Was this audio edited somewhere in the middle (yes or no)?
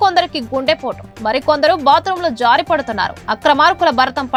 no